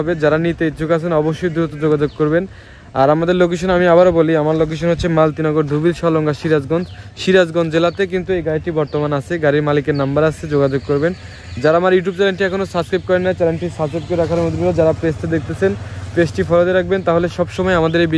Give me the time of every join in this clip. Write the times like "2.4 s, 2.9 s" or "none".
none